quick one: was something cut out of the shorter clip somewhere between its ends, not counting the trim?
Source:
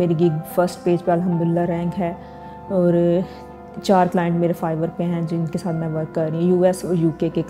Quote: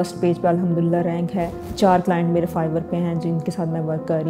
yes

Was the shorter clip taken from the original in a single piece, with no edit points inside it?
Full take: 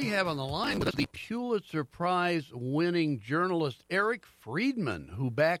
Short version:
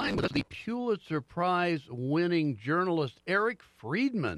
yes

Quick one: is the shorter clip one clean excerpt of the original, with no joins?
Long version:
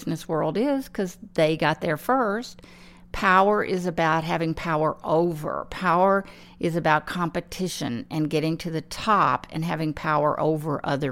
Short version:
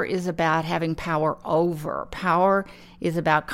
yes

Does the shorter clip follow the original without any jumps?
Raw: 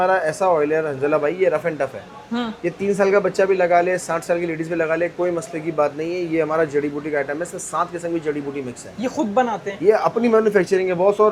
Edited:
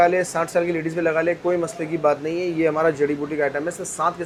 yes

